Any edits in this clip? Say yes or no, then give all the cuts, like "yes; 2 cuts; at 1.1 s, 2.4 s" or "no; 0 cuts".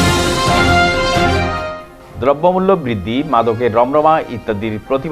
no; 0 cuts